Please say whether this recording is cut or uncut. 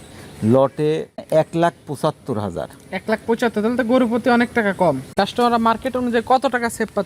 cut